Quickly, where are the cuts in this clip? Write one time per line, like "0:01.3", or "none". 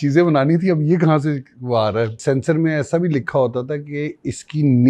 0:02.2